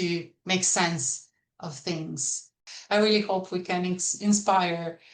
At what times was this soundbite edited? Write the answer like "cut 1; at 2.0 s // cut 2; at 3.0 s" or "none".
cut 1; at 2.7 s